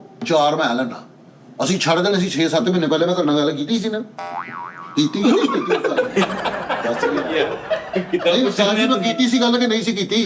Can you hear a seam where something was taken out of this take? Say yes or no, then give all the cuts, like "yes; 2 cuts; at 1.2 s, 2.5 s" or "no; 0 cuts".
no; 0 cuts